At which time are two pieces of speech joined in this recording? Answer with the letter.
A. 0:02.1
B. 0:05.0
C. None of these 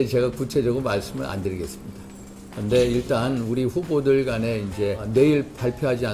B